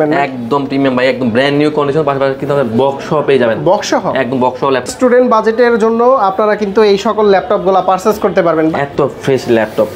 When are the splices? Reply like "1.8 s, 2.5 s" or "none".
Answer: 4.9 s, 8.7 s